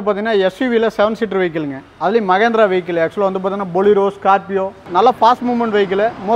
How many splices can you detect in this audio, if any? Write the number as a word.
one